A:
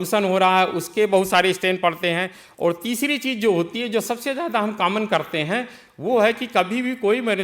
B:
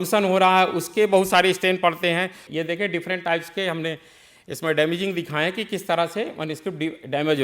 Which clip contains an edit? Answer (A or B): B